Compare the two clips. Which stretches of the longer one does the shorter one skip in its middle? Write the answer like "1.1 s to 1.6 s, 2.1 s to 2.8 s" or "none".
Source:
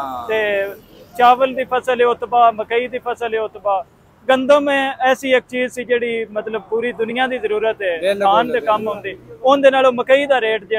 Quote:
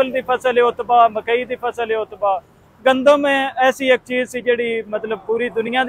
none